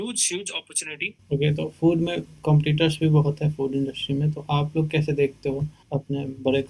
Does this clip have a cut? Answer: yes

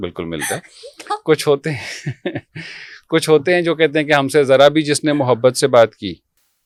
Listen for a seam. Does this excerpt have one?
no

